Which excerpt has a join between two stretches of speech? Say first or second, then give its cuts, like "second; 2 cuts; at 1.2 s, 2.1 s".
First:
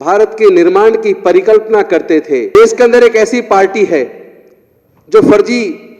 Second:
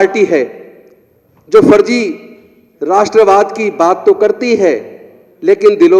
first; 1 cut; at 2.5 s